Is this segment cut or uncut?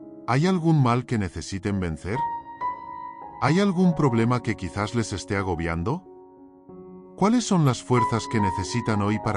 uncut